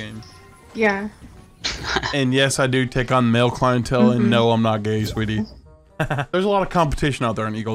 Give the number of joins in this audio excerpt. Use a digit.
1